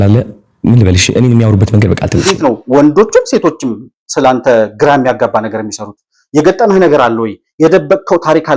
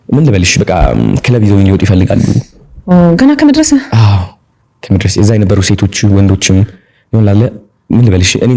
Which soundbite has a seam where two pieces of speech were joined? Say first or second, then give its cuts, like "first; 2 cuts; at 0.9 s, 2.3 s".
first; 1 cut; at 2.3 s